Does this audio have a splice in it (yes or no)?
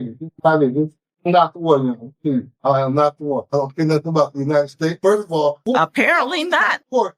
no